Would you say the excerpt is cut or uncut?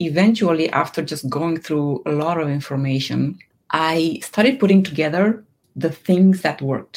cut